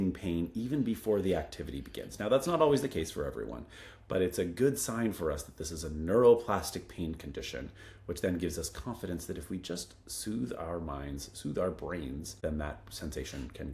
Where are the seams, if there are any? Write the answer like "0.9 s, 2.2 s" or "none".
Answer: 12.3 s